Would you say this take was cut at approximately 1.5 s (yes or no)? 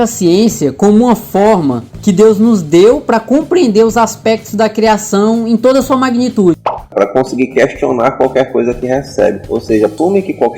no